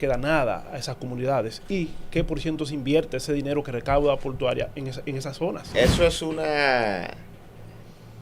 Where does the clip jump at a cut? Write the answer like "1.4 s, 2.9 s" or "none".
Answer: 5.7 s